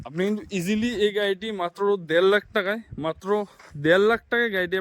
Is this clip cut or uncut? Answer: uncut